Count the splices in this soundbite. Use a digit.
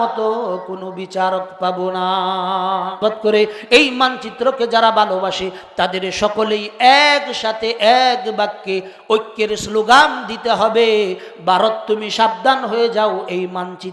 1